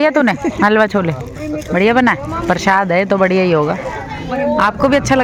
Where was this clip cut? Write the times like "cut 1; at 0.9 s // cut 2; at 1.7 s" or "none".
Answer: none

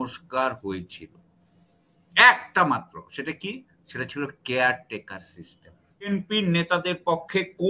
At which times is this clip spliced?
cut 1; at 6.1 s

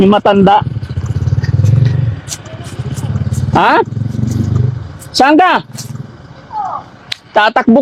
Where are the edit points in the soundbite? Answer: none

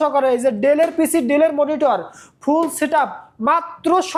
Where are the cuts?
none

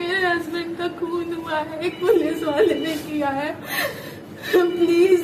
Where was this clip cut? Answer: none

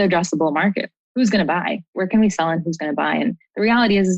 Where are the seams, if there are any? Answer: cut 1; at 0.9 s // cut 2; at 2.0 s

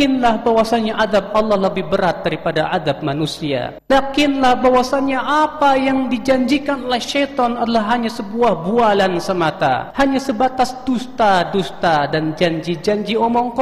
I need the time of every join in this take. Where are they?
cut 1; at 3.7 s // cut 2; at 9.9 s

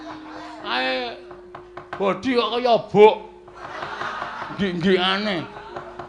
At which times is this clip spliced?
cut 1; at 4.5 s

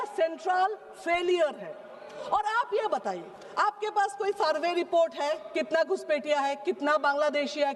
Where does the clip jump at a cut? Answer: none

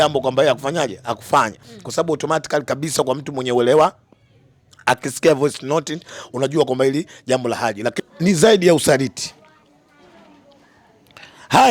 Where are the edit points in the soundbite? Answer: cut 1; at 8.1 s

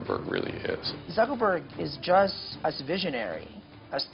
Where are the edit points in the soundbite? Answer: cut 1; at 0.9 s // cut 2; at 2.5 s

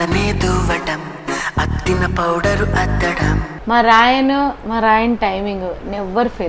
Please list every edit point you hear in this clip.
cut 1; at 3.5 s

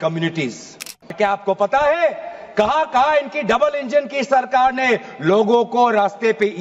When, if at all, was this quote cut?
cut 1; at 1.1 s

